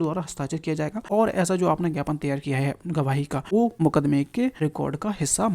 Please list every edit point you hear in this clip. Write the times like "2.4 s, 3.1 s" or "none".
1.0 s, 3.7 s, 4.6 s